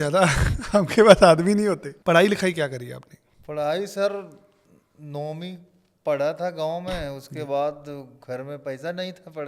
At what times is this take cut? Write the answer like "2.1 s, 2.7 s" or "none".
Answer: 1.9 s